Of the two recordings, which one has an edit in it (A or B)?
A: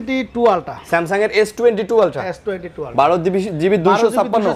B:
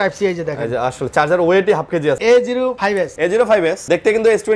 B